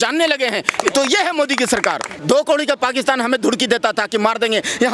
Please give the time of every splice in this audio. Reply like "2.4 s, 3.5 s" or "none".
2.2 s

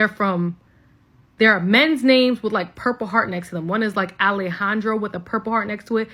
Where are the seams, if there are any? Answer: none

